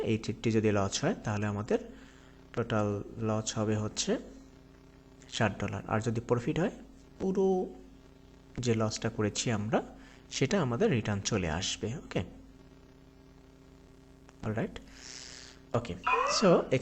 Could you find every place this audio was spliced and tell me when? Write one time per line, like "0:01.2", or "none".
0:13.9